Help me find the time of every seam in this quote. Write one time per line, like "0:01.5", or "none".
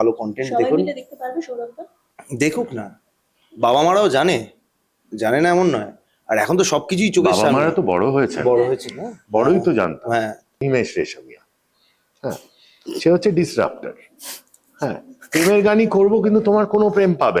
0:10.6